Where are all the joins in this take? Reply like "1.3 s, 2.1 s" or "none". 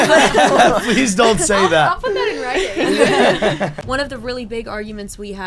3.8 s